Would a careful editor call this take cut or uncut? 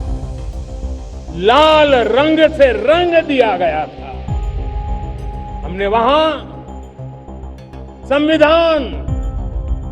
cut